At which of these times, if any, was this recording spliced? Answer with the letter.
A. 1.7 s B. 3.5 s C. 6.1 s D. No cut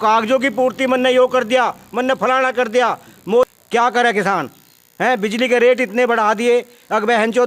B